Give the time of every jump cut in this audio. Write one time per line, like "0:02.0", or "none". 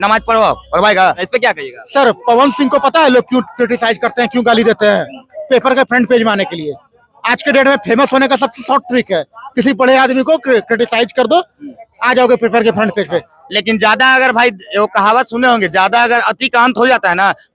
0:01.3
0:13.3